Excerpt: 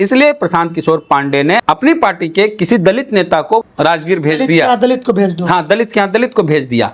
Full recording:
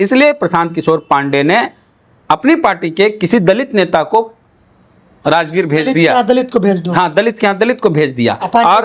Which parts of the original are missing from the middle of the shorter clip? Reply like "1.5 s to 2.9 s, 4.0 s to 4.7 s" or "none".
1.6 s to 2.2 s, 4.3 s to 5.2 s